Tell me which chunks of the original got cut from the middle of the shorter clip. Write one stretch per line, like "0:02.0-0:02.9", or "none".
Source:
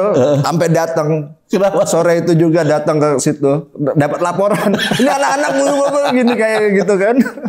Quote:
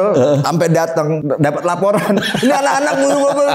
0:01.2-0:03.8